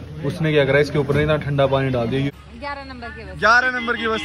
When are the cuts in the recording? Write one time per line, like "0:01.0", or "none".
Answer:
0:02.3